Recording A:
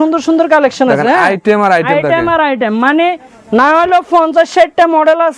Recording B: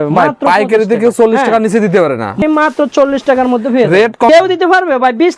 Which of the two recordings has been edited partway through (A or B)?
B